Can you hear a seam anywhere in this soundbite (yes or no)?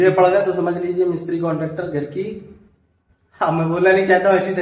no